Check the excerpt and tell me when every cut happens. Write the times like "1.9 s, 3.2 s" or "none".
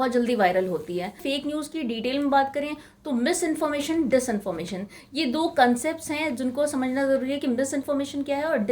1.2 s